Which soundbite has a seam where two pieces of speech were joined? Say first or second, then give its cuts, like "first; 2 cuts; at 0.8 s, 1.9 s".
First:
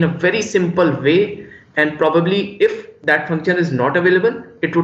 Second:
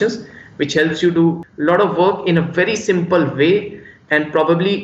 second; 1 cut; at 1.4 s